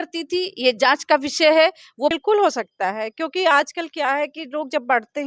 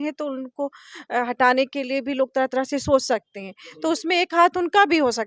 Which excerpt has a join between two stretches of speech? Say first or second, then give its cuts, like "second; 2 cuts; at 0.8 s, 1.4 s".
first; 1 cut; at 2.2 s